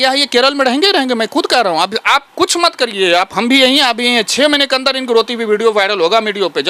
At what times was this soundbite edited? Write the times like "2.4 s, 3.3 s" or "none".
none